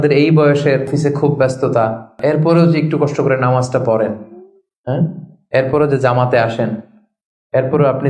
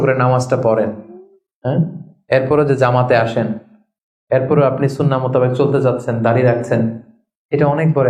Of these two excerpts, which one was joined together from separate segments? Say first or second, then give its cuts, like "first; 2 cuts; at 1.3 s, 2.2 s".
first; 2 cuts; at 0.9 s, 2.2 s